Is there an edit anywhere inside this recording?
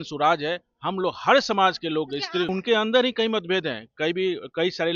yes; 1 cut; at 2.5 s

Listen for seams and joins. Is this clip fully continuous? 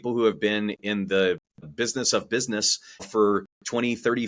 no; 2 cuts; at 1.6 s, 3.0 s

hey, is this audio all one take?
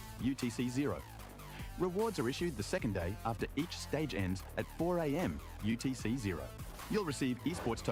yes; 0 cuts

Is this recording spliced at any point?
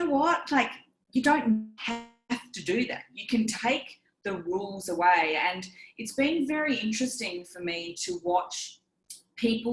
no; 0 cuts

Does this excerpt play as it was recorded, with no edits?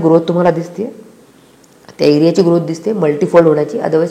yes; 0 cuts

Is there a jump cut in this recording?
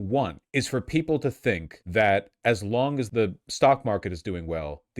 yes; 2 cuts; at 1.7 s, 3.0 s

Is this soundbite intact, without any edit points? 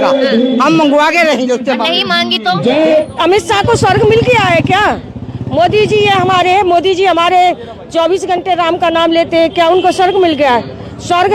no; 1 cut; at 3.0 s

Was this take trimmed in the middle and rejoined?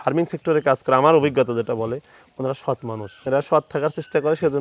yes; 1 cut; at 3.2 s

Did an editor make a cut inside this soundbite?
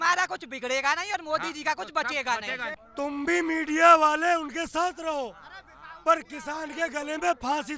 yes; 1 cut; at 2.8 s

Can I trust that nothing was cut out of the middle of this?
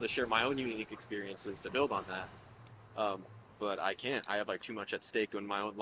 yes; 0 cuts

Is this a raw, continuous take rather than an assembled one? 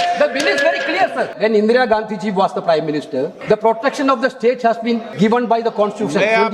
no; 3 cuts; at 1.3 s, 3.4 s, 5.1 s

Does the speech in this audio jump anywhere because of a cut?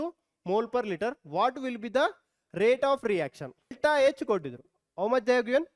yes; 1 cut; at 3.7 s

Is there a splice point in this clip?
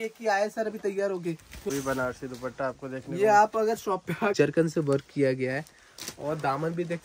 yes; 2 cuts; at 1.7 s, 4.3 s

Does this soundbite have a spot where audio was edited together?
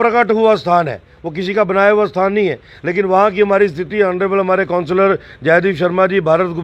no; 0 cuts

